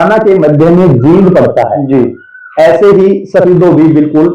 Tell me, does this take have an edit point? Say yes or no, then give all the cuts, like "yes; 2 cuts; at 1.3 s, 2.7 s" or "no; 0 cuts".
no; 0 cuts